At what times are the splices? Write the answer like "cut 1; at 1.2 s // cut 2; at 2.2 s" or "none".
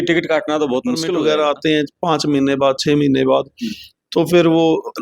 cut 1; at 1.1 s